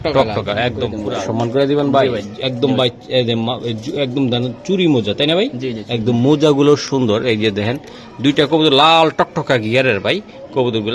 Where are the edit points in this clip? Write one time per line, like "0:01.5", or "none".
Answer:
0:00.9